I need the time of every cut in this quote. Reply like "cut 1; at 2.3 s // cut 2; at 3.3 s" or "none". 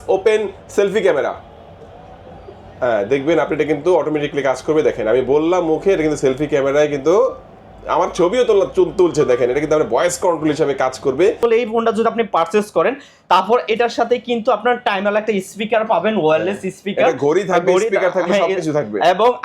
cut 1; at 11.4 s